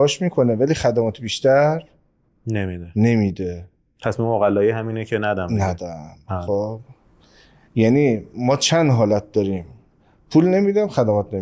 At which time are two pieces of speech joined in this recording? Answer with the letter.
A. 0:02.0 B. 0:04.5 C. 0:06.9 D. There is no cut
D